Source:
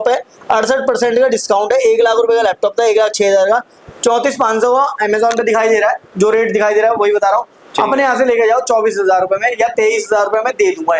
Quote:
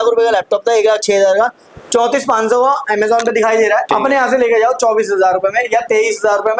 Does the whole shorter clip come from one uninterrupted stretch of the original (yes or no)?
no